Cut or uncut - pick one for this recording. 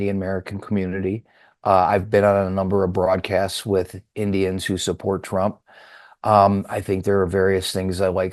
uncut